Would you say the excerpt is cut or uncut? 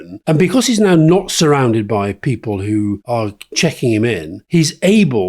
cut